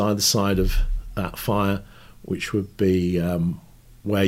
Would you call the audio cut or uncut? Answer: uncut